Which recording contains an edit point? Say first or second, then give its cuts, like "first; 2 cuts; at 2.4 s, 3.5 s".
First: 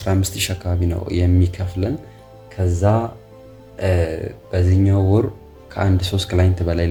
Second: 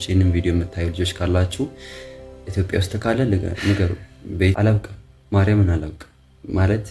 second; 1 cut; at 4.5 s